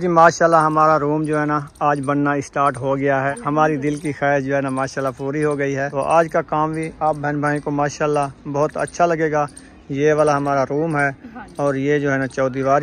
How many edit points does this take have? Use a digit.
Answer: 2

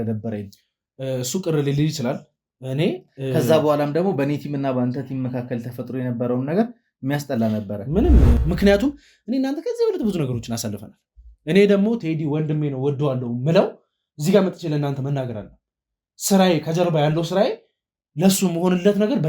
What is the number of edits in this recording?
1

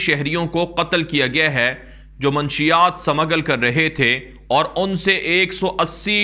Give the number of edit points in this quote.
0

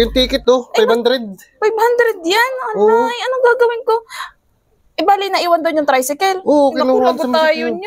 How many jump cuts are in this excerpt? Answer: 0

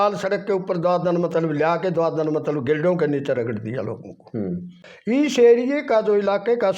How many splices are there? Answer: 1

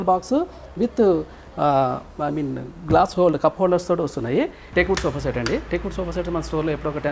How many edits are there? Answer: 1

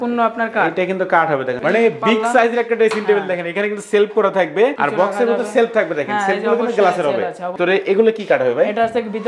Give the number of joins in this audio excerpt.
3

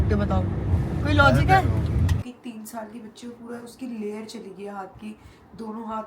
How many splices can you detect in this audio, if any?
1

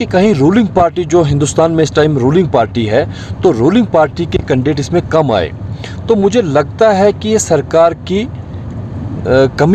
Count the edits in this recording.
0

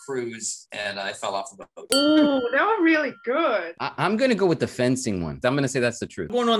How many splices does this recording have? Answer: 0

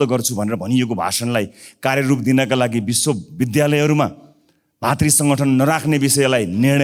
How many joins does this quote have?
0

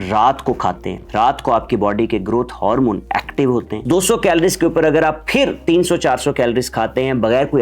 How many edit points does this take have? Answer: 2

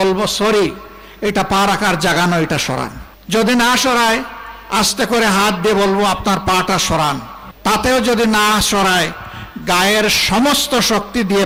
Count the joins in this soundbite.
0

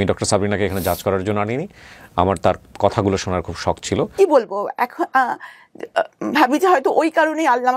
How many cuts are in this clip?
1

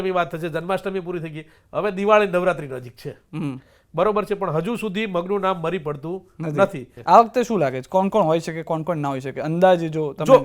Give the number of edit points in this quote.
1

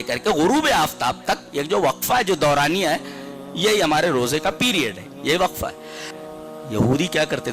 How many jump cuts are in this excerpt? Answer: 1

